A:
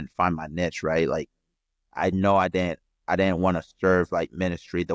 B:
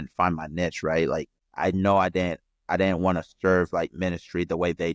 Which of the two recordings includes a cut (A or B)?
B